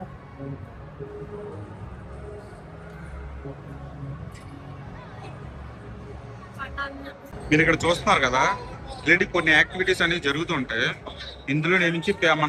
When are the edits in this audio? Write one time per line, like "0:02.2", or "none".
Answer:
none

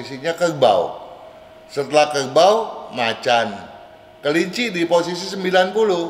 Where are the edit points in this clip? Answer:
none

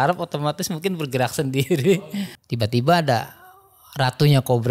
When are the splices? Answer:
0:02.0

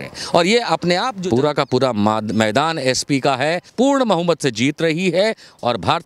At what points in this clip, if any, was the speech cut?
0:01.1
0:03.7

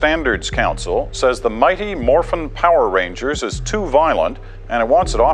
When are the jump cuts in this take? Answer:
none

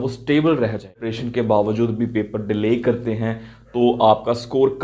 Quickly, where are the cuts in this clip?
0:01.1

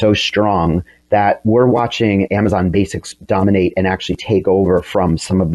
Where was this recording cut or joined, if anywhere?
0:01.4

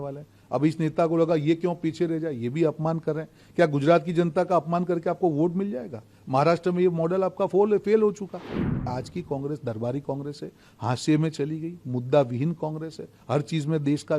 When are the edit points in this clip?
0:08.9

